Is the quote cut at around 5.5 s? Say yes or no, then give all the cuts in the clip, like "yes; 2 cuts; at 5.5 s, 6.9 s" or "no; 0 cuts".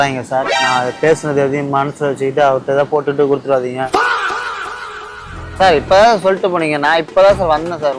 yes; 2 cuts; at 3.9 s, 5.5 s